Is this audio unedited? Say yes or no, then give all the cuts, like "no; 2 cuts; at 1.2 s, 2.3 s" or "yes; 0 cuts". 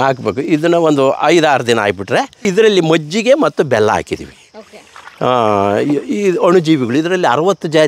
no; 1 cut; at 2.4 s